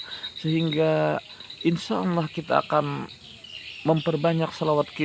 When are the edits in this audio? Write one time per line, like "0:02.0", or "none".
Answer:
none

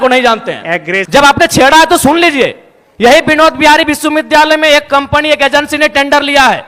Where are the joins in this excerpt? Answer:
none

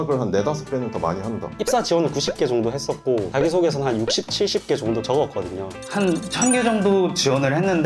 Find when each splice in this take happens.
0:01.6
0:05.8

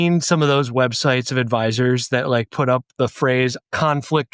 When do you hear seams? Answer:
none

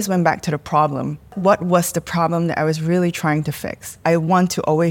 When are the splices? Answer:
0:01.3
0:04.0

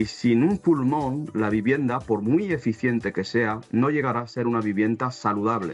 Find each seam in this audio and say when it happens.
none

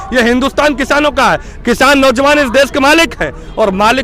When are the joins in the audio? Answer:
none

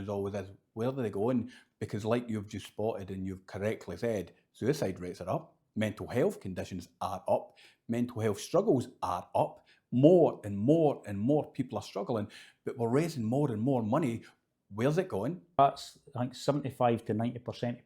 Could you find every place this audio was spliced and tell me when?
0:15.6

